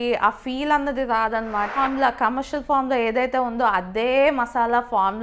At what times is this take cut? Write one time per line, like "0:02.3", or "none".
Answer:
0:01.7